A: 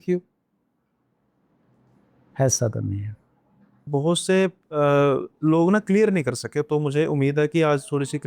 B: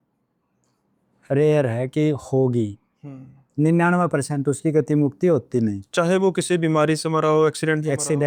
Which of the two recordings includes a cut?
A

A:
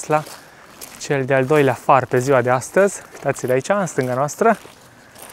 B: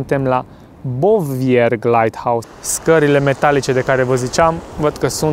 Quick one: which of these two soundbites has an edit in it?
B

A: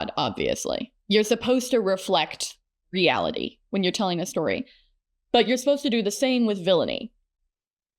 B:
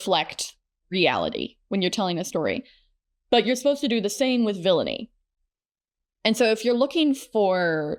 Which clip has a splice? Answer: A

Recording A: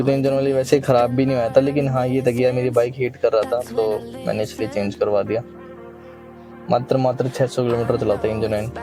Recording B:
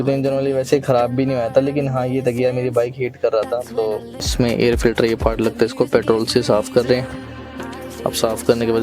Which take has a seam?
B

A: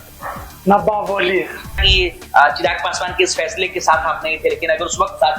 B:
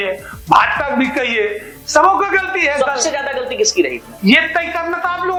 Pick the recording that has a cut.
A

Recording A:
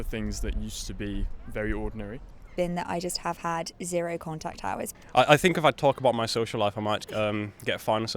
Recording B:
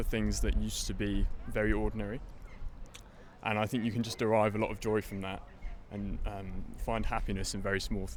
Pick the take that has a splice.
A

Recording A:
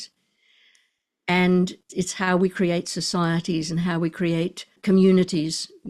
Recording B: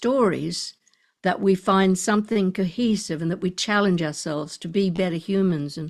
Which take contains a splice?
A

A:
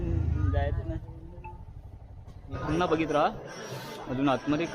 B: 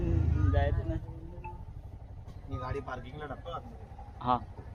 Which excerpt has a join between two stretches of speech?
A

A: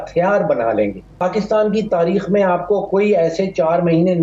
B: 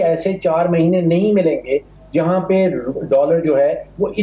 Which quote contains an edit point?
A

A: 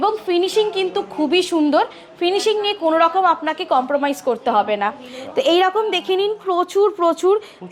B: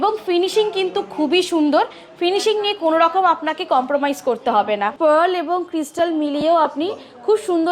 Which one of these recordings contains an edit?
B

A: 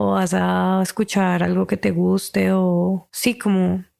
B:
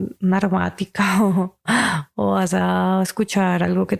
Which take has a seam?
A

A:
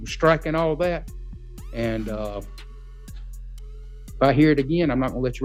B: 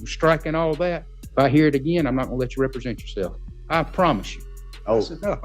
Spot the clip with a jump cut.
B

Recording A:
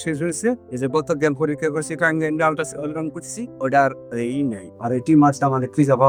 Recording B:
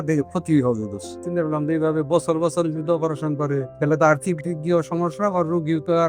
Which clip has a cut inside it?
B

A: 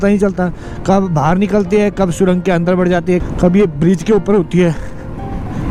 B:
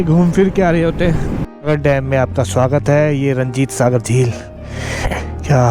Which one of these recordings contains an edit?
B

